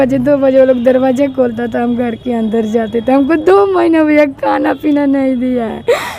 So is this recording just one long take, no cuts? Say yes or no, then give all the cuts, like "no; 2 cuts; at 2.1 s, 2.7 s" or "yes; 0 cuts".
yes; 0 cuts